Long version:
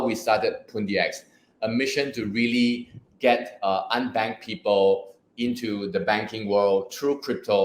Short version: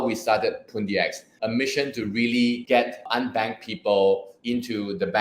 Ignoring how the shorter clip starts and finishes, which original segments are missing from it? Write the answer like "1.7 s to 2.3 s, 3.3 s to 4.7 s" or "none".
1.2 s to 1.4 s, 3.2 s to 3.8 s, 5.1 s to 5.3 s